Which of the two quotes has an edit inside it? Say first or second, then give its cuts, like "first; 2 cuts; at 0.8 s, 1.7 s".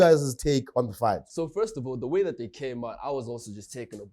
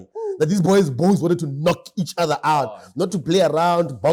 first; 1 cut; at 1.3 s